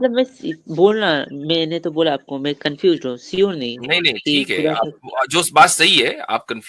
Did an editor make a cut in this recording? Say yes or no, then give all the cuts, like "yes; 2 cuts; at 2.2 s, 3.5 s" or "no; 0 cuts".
no; 0 cuts